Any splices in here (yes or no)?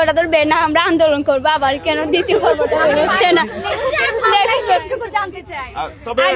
no